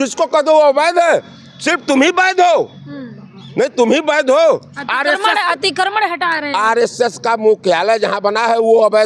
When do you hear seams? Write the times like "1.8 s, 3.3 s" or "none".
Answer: none